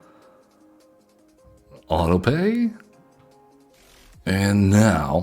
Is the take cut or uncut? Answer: cut